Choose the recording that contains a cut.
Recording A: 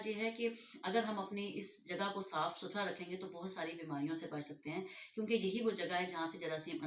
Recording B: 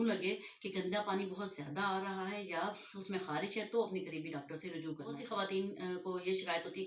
B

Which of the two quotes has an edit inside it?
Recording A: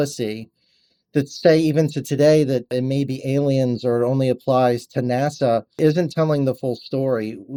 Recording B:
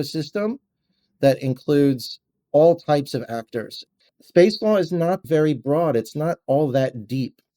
B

